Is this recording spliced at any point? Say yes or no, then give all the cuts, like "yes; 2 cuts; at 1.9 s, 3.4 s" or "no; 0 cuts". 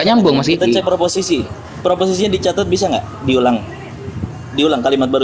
no; 0 cuts